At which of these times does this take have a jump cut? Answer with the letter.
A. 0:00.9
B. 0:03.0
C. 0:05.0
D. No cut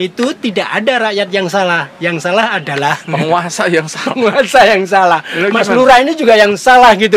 D